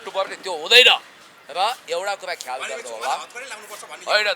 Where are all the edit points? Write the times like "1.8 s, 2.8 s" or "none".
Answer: none